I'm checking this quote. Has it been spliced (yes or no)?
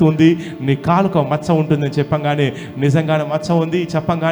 no